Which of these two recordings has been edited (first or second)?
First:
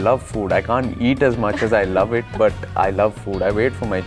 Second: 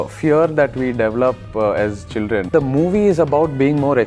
second